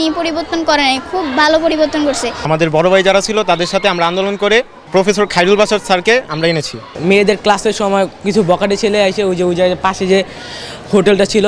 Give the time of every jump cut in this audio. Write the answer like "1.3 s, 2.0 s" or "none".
2.4 s, 4.8 s, 7.0 s